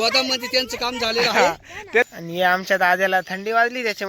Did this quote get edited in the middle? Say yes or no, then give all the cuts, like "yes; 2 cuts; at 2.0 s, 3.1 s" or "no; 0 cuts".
yes; 1 cut; at 2.1 s